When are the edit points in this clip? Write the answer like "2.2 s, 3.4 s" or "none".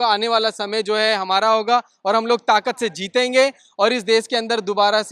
none